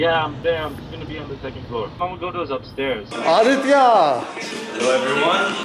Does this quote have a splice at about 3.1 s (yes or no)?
yes